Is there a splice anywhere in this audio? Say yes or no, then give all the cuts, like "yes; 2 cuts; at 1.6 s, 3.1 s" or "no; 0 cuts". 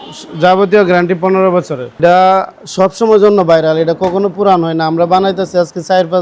yes; 1 cut; at 1.9 s